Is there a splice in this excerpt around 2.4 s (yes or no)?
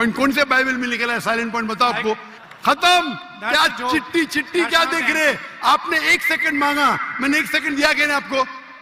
yes